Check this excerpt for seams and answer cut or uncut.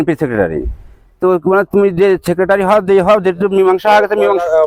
uncut